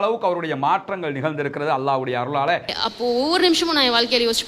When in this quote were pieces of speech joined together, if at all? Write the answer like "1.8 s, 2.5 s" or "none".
2.7 s